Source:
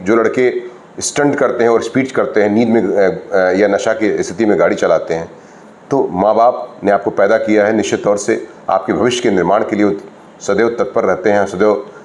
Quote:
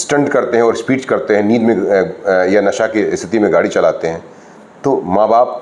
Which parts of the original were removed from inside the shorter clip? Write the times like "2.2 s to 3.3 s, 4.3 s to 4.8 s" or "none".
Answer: none